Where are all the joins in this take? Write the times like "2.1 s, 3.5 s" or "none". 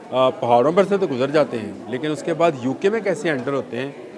none